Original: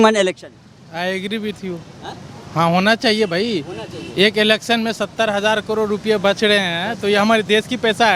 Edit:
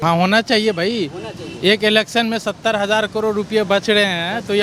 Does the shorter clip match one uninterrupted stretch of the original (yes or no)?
yes